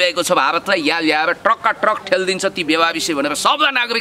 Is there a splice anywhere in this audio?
no; 0 cuts

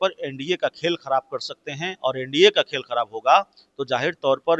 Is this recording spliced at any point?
no; 0 cuts

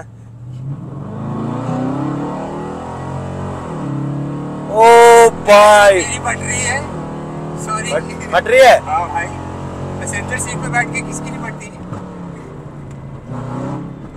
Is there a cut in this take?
no; 0 cuts

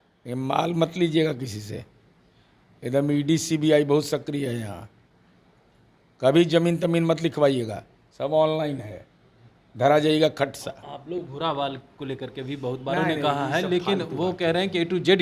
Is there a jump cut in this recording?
no; 0 cuts

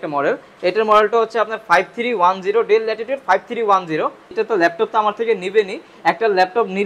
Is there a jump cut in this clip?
yes; 1 cut; at 4.4 s

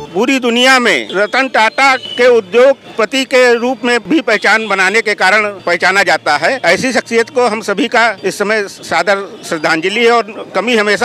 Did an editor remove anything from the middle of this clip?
yes; 7 cuts; at 1.0 s, 2.1 s, 2.9 s, 4.0 s, 5.6 s, 6.6 s, 8.2 s

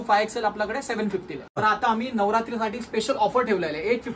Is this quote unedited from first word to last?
no; 1 cut; at 1.9 s

